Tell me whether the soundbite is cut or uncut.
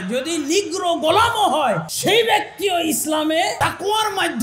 cut